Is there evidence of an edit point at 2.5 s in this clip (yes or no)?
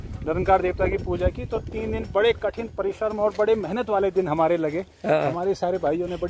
no